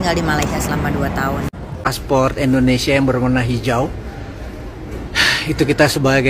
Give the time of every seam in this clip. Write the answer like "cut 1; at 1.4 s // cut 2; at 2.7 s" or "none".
cut 1; at 1.9 s